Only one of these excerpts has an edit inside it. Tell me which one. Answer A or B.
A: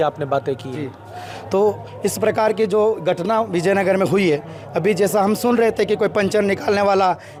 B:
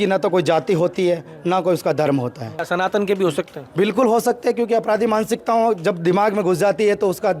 B